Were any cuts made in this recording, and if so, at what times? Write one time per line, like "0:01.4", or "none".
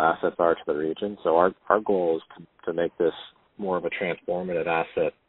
none